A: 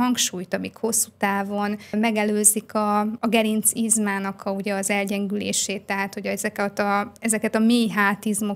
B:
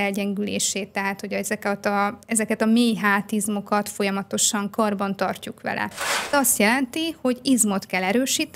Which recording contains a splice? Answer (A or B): B